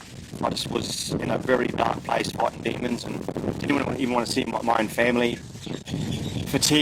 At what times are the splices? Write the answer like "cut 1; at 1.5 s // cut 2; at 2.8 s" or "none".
none